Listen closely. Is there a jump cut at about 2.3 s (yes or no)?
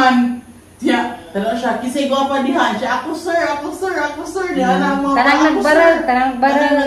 yes